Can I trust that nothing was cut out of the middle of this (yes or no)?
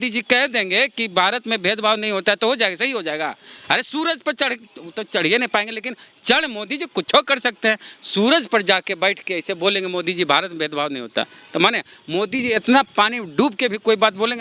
yes